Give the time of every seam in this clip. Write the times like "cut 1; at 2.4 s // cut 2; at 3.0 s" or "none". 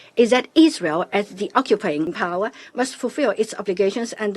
cut 1; at 2.2 s